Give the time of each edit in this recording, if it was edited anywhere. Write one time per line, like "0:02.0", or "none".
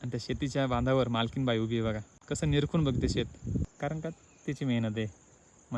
0:02.1
0:03.7